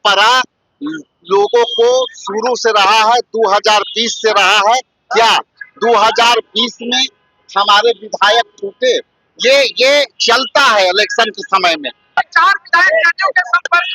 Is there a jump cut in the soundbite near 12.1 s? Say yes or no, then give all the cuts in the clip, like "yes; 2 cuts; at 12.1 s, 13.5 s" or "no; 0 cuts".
yes; 1 cut; at 12.1 s